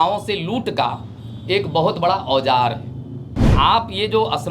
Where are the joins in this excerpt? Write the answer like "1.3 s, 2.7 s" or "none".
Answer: 3.5 s